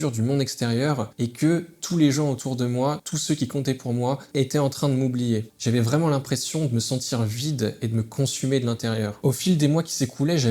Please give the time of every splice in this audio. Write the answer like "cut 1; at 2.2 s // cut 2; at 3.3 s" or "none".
cut 1; at 1.1 s // cut 2; at 3.1 s // cut 3; at 5.5 s // cut 4; at 9.1 s